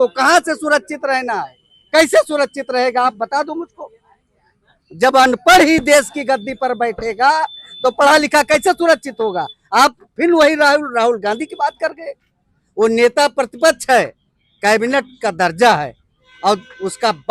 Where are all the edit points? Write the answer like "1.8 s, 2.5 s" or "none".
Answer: none